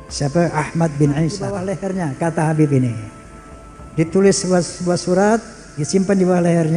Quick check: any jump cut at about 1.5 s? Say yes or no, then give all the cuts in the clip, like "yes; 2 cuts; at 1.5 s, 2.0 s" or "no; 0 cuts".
yes; 1 cut; at 1.5 s